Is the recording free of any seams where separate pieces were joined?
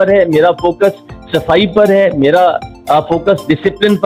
yes; 0 cuts

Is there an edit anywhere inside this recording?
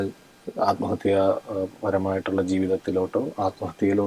no; 0 cuts

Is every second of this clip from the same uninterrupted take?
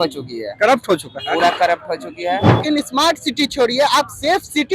no; 1 cut; at 2.6 s

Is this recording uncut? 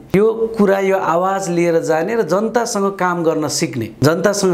yes; 0 cuts

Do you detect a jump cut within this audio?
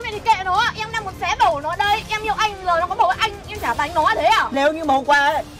yes; 1 cut; at 4.5 s

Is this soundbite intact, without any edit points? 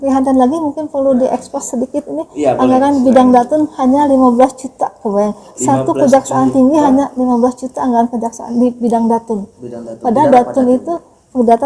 yes; 0 cuts

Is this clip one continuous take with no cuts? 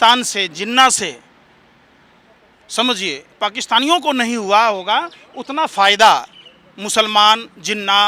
yes; 0 cuts

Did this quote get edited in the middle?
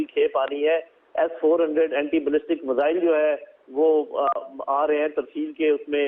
no; 0 cuts

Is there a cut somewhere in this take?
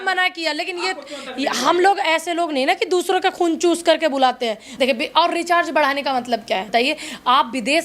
yes; 2 cuts; at 4.6 s, 6.7 s

